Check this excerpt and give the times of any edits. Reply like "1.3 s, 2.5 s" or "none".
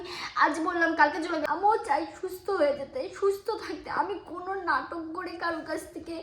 1.4 s